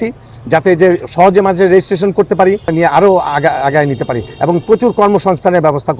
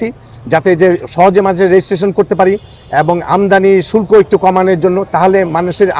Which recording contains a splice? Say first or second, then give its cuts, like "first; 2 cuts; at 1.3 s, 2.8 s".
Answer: first; 1 cut; at 2.7 s